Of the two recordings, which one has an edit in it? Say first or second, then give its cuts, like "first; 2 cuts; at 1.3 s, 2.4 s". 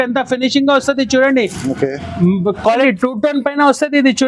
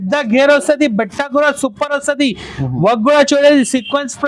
first; 1 cut; at 2.8 s